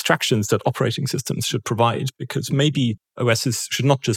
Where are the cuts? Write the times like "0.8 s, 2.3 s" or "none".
3.1 s